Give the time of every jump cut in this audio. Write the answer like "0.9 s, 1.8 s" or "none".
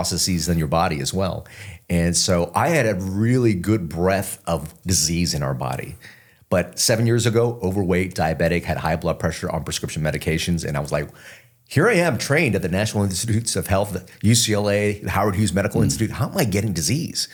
none